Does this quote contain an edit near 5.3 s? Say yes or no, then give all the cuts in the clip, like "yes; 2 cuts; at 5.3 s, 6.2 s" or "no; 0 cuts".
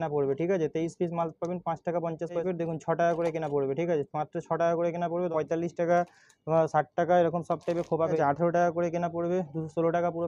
yes; 3 cuts; at 2.4 s, 5.3 s, 8.2 s